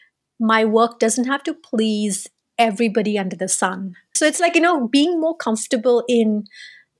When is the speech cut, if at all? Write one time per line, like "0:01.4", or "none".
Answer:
0:04.1

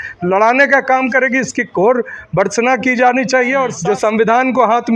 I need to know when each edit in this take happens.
0:03.7

